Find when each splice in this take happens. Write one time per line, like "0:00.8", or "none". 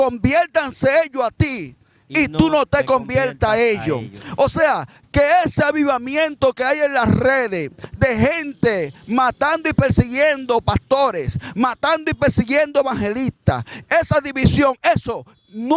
none

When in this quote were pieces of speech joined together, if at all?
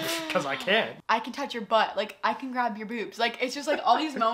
0:01.0

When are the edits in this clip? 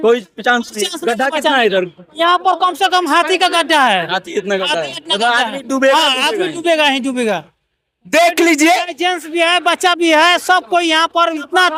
none

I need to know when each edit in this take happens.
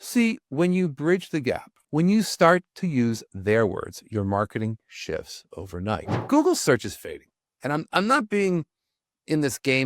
0:01.7
0:06.2

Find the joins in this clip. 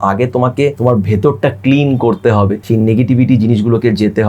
0:00.8
0:02.6

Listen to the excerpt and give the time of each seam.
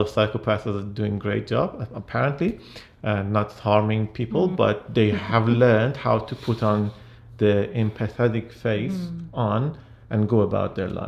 none

